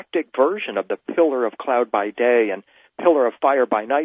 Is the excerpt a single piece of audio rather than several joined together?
no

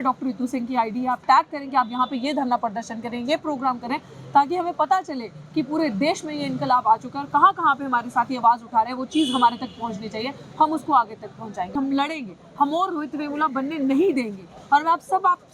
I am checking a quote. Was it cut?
yes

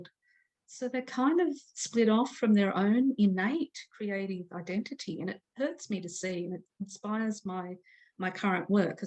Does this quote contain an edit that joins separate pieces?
no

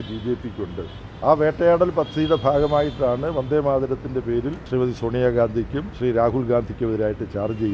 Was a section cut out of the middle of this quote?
yes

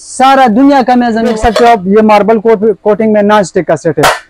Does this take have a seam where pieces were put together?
yes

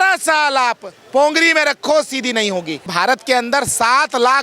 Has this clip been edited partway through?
yes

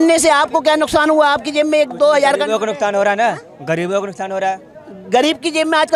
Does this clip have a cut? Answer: no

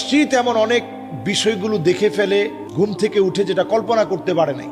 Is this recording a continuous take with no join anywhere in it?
no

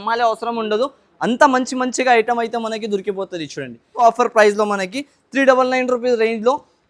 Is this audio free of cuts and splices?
no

